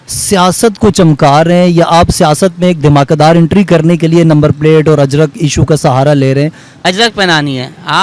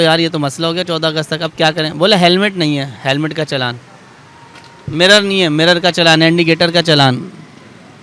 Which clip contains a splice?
first; 1 cut; at 6.7 s

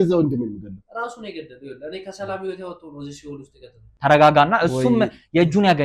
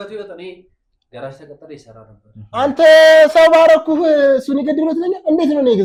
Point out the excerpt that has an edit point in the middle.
first; 1 cut; at 4.0 s

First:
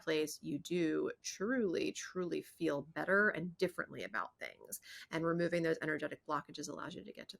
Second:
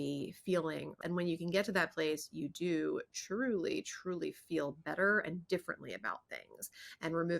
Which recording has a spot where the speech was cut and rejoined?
second; 1 cut; at 0.9 s

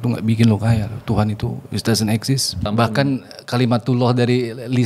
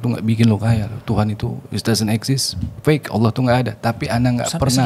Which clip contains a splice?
first; 1 cut; at 2.7 s

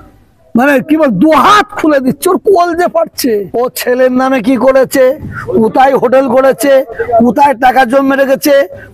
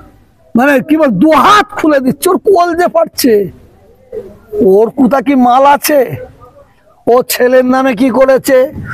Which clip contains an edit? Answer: first; 1 cut; at 3.5 s

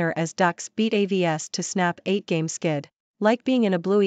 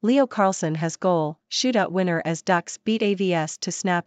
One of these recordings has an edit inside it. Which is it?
first; 1 cut; at 3.0 s

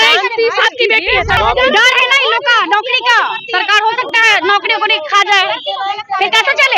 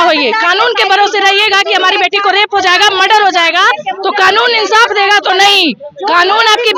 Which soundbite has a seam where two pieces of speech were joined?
first; 1 cut; at 1.4 s

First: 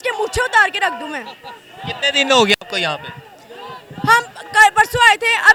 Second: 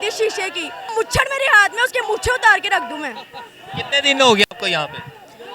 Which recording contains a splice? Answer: second; 1 cut; at 0.9 s

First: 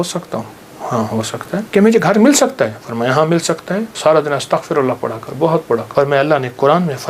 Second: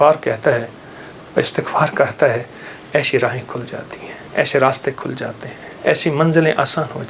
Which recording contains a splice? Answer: first; 3 cuts; at 1.7 s, 3.9 s, 5.9 s

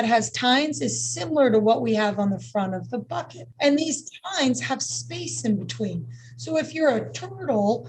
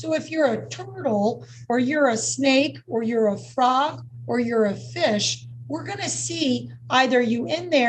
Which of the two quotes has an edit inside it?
first; 1 cut; at 3.6 s

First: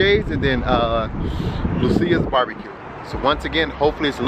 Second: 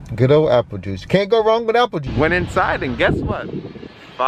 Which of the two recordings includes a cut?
second; 1 cut; at 2.1 s

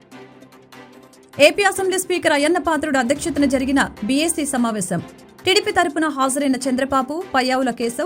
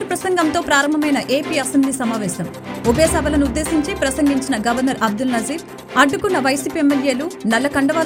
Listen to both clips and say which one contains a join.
first; 1 cut; at 1.4 s

